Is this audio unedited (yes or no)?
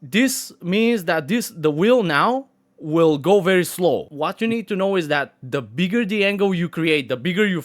no